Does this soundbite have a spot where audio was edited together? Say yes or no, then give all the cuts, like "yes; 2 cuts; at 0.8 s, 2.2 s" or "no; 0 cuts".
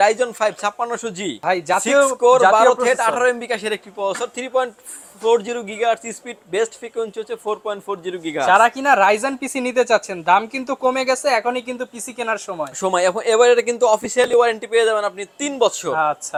no; 0 cuts